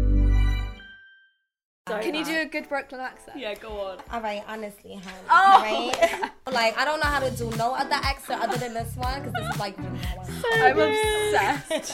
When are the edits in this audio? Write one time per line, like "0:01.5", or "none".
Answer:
0:01.8
0:04.0
0:06.5